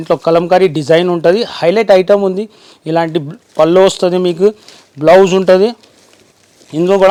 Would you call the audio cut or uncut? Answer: uncut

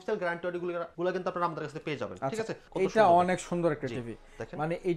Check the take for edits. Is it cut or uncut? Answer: cut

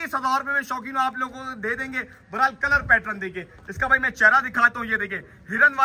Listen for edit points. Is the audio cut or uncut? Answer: uncut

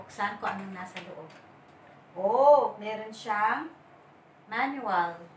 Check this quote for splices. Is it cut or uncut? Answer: cut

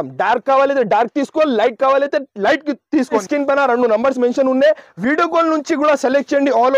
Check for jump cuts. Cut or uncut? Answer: cut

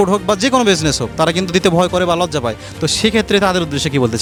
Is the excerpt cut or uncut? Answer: uncut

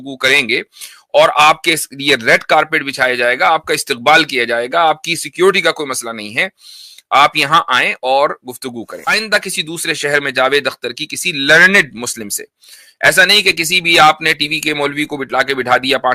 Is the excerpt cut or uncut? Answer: cut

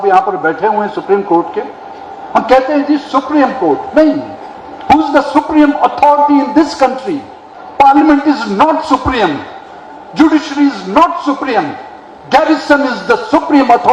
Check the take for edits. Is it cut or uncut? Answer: uncut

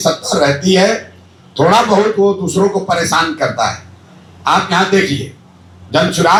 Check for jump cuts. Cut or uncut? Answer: uncut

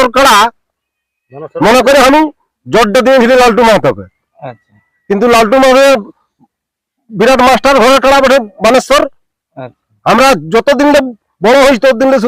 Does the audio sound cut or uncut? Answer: uncut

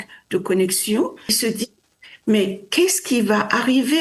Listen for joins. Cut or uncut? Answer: cut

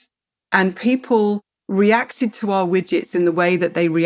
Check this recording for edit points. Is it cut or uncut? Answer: uncut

